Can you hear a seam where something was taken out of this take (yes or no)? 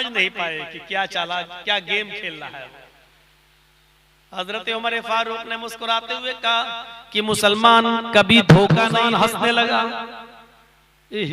yes